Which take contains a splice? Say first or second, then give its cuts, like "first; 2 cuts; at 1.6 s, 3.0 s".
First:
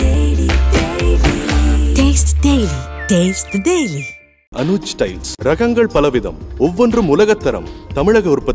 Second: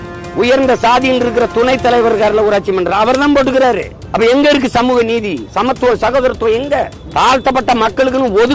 second; 2 cuts; at 4.0 s, 7.0 s